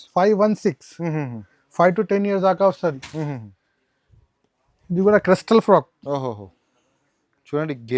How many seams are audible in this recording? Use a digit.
0